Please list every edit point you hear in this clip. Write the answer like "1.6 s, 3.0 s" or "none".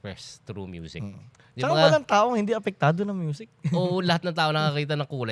1.4 s